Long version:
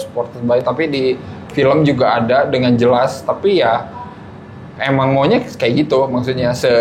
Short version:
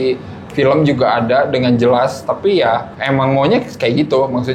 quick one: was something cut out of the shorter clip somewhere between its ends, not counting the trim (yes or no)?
yes